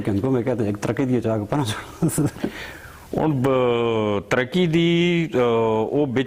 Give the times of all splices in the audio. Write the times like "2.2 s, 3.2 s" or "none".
none